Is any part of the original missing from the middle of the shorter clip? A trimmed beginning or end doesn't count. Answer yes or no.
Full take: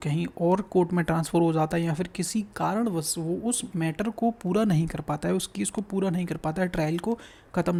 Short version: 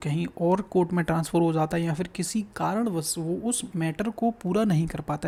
no